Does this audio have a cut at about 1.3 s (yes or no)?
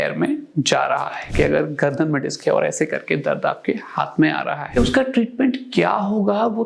yes